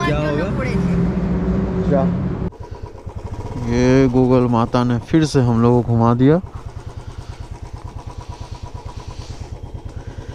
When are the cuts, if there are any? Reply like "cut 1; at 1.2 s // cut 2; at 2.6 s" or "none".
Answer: cut 1; at 2.5 s